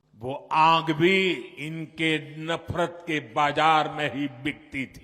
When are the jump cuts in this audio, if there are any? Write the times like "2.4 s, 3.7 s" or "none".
1.6 s